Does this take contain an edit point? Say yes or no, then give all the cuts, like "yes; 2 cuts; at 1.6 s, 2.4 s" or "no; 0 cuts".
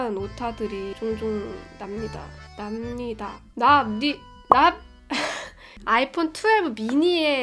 yes; 2 cuts; at 4.3 s, 5.8 s